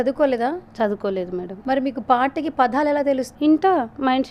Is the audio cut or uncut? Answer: cut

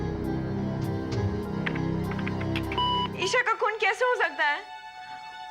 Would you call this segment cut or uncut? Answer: cut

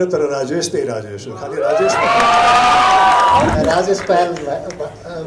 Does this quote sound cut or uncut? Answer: cut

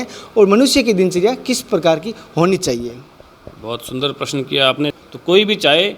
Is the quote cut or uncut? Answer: cut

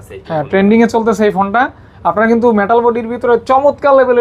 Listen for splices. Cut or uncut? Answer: uncut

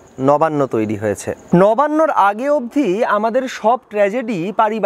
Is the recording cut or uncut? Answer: cut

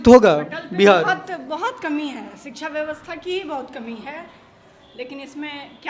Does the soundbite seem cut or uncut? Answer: uncut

